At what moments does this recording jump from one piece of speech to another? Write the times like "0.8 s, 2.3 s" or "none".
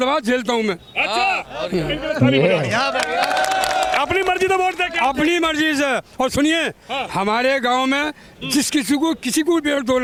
none